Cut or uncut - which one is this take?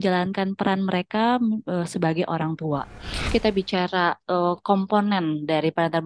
cut